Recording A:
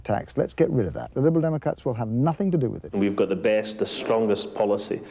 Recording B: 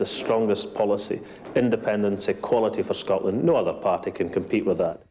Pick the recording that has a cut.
A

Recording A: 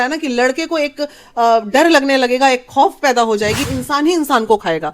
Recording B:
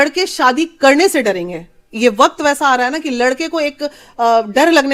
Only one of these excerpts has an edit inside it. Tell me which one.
A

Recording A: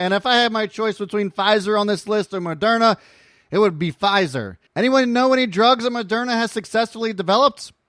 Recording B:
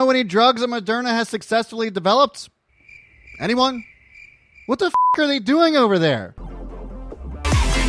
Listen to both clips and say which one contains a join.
B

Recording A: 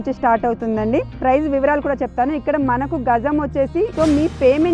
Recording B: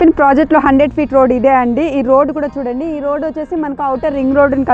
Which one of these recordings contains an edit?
A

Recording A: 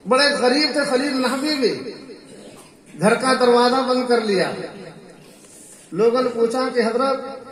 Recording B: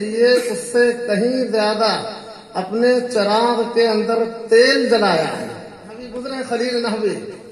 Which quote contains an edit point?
B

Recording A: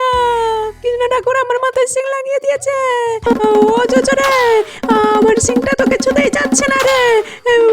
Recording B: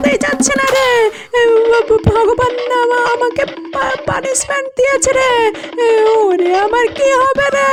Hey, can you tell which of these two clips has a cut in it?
A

